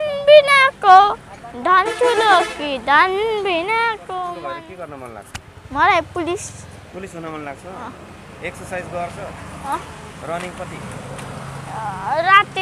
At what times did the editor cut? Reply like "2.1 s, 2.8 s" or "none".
4.4 s